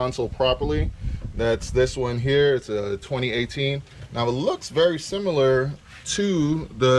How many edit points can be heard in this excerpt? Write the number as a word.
zero